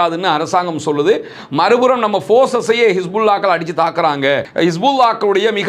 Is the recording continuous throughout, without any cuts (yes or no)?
no